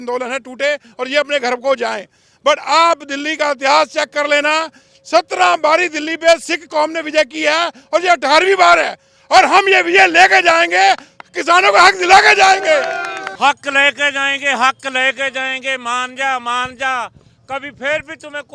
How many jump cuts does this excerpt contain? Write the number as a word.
one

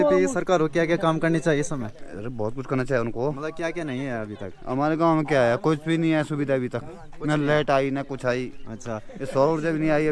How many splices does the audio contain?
zero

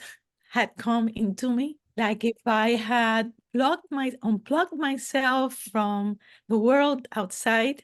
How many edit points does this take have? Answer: one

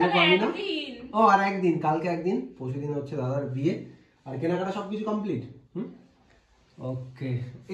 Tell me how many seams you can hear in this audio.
zero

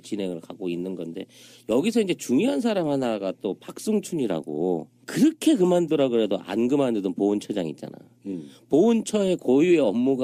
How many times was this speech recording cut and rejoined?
one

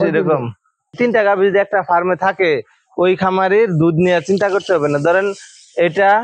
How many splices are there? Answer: one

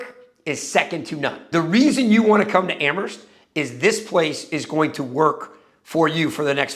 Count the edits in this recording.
zero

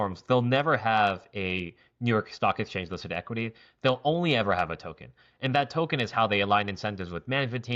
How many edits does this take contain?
zero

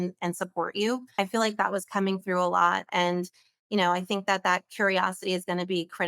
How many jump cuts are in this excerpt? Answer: one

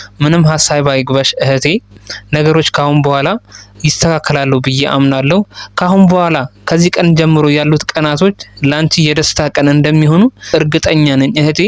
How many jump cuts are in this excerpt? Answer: one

